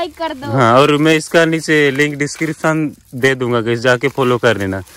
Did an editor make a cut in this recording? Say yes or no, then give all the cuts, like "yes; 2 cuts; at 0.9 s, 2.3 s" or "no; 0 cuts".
no; 0 cuts